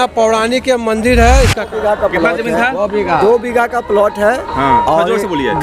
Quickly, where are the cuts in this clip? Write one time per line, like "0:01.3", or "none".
0:01.6